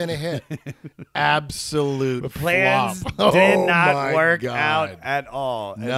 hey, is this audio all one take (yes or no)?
yes